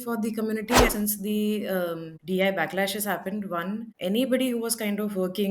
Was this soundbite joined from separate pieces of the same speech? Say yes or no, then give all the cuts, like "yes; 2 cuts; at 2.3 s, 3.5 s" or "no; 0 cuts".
yes; 3 cuts; at 0.9 s, 2.1 s, 3.9 s